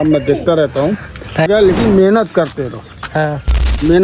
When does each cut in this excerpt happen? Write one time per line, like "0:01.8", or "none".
0:01.5